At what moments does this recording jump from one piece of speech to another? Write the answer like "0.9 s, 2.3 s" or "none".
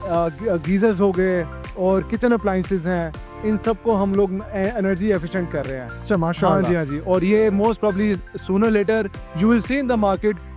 none